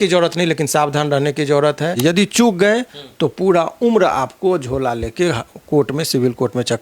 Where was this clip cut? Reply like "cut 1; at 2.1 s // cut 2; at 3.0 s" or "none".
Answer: cut 1; at 1.9 s